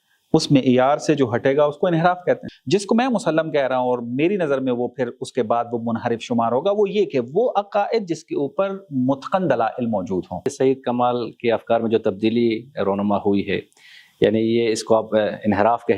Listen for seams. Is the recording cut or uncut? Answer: cut